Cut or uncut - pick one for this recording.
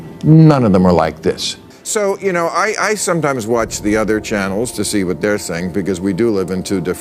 cut